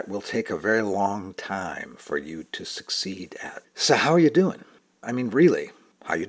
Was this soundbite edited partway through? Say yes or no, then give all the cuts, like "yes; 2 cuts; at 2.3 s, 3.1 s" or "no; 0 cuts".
yes; 1 cut; at 5.0 s